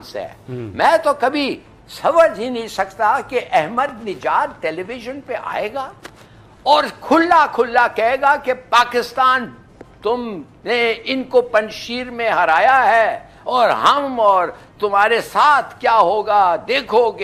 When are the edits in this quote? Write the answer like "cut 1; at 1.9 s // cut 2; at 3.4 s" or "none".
none

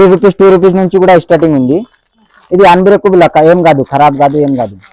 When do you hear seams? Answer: none

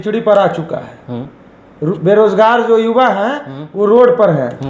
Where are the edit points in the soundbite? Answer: none

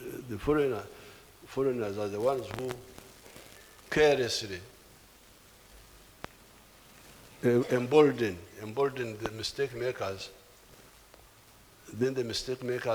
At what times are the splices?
none

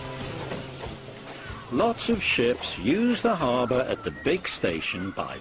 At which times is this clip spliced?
none

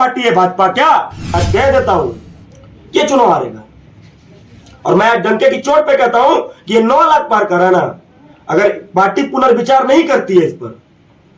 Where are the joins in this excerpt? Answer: cut 1; at 1.4 s

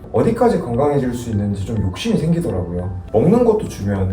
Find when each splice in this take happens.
cut 1; at 3.0 s

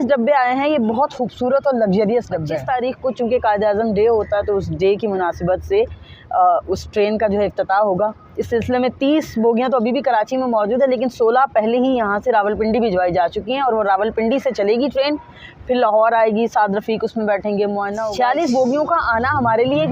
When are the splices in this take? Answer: cut 1; at 2.5 s // cut 2; at 18.0 s

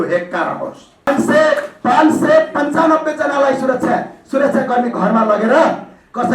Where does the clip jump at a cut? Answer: cut 1; at 1.1 s

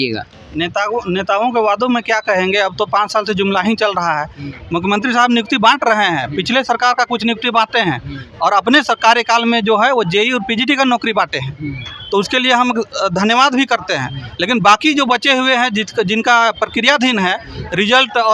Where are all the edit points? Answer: none

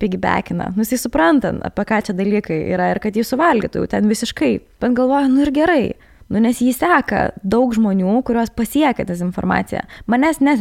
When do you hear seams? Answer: cut 1; at 4.7 s

